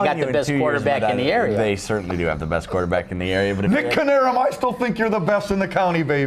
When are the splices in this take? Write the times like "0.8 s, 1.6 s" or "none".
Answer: none